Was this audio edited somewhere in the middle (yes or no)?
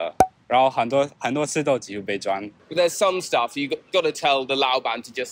yes